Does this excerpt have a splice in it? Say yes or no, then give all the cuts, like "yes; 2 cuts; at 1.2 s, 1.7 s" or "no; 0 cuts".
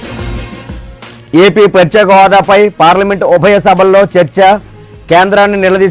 yes; 1 cut; at 1.0 s